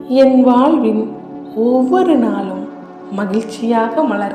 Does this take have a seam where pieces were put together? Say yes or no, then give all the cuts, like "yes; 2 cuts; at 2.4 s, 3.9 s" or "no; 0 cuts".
no; 0 cuts